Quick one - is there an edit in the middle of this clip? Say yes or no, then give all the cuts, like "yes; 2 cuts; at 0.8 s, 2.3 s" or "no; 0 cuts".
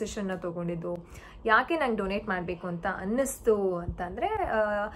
no; 0 cuts